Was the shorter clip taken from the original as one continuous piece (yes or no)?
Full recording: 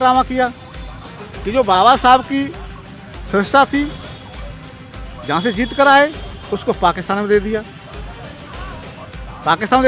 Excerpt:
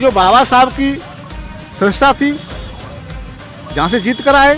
yes